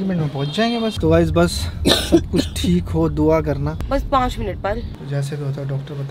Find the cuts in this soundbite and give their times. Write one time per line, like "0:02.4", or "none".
0:01.0
0:03.8
0:04.9